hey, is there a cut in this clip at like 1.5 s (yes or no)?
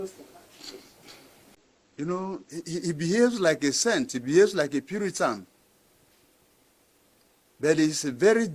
yes